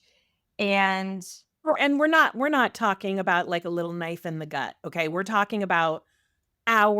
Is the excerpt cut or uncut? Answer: cut